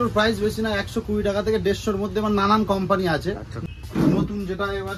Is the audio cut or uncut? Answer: cut